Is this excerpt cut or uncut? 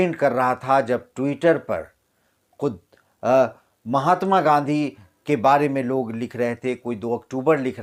uncut